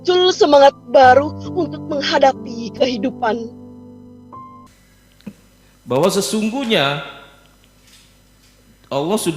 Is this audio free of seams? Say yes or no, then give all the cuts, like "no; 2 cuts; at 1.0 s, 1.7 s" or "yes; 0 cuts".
no; 1 cut; at 4.6 s